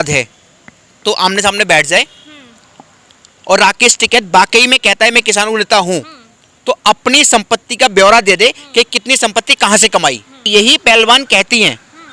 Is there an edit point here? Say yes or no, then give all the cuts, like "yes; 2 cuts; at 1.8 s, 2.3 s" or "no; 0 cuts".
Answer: yes; 1 cut; at 10.4 s